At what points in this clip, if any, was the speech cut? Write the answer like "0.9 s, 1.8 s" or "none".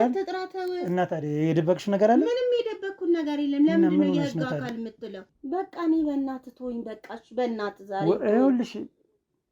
5.3 s